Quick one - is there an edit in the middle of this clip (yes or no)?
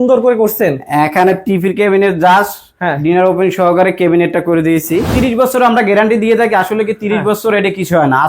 yes